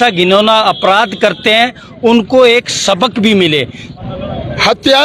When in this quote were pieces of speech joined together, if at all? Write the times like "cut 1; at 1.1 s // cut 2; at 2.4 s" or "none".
cut 1; at 3.8 s